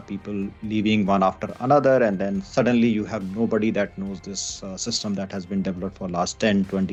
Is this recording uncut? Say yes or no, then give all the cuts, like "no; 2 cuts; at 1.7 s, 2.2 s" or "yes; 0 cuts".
yes; 0 cuts